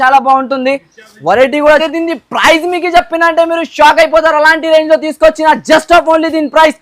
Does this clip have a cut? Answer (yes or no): yes